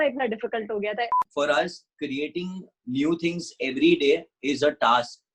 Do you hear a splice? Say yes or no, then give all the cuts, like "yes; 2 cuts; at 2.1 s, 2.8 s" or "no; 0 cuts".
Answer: yes; 1 cut; at 1.3 s